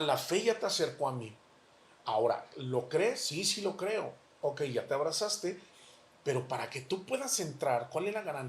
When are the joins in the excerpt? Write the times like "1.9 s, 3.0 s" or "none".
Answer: none

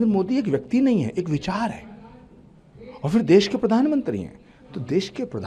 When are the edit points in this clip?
none

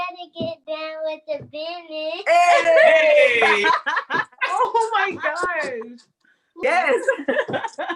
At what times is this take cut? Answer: 6.6 s

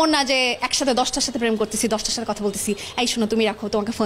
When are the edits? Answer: none

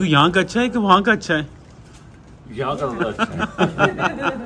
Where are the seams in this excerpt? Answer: none

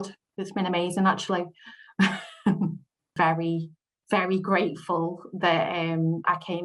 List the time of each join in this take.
3.1 s

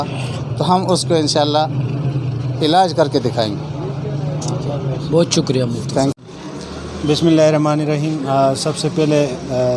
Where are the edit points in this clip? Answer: none

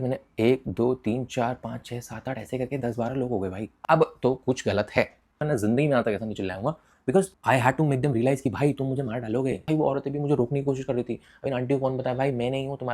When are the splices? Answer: 3.6 s, 5.4 s, 9.6 s

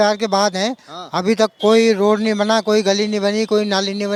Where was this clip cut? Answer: none

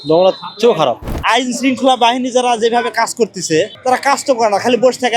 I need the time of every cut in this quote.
1.1 s, 3.7 s

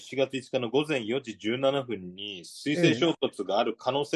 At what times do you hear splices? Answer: none

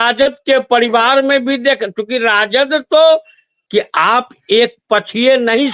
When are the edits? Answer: 3.5 s

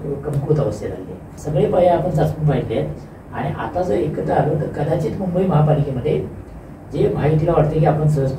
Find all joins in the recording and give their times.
1.4 s

